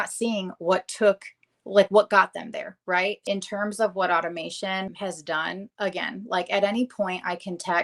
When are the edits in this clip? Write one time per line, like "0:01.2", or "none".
0:03.2
0:04.9